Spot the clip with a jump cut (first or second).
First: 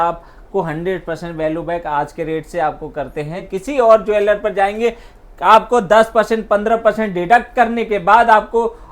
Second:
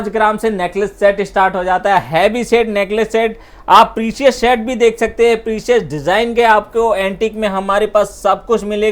first